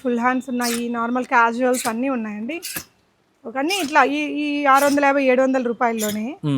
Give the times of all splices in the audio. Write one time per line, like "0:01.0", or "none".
none